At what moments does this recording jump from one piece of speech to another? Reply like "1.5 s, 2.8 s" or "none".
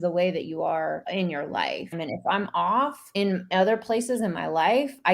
1.0 s, 1.9 s, 3.0 s